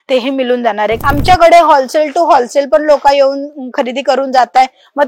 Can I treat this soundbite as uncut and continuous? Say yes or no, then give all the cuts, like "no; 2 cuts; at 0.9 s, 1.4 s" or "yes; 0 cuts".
no; 1 cut; at 1.0 s